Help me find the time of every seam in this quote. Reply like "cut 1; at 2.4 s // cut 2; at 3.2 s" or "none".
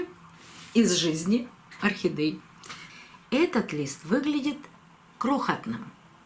cut 1; at 2.9 s